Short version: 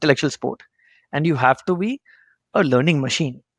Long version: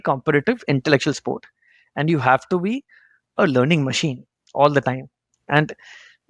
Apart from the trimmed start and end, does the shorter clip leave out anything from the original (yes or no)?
no